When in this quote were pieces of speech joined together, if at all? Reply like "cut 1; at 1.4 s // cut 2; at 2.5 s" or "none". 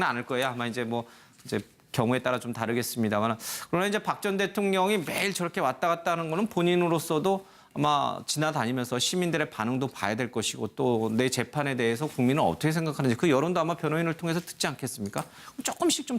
cut 1; at 5.3 s